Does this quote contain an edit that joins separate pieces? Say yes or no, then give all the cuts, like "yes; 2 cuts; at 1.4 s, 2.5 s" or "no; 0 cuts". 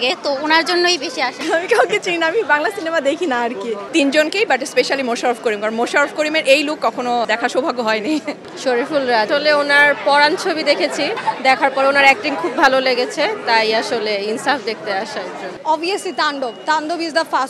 yes; 7 cuts; at 1.4 s, 3.8 s, 7.3 s, 8.4 s, 9.3 s, 11.1 s, 15.5 s